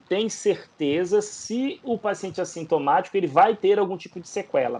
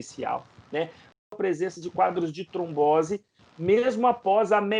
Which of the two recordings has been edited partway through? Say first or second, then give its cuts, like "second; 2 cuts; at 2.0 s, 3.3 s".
second; 1 cut; at 1.2 s